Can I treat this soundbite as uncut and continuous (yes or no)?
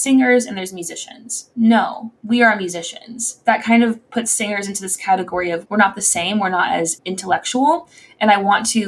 no